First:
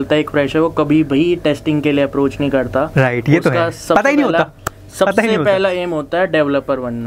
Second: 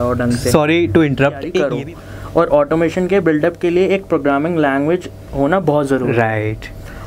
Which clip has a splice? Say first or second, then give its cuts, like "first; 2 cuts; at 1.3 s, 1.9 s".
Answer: second; 1 cut; at 1.6 s